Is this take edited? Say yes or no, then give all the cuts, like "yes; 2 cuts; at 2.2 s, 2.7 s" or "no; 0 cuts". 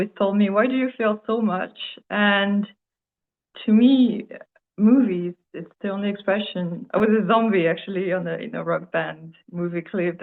yes; 1 cut; at 6.8 s